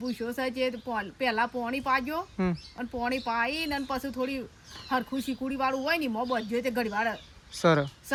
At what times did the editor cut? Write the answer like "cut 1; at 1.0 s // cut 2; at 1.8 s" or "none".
none